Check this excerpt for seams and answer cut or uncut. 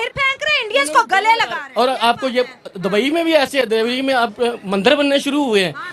cut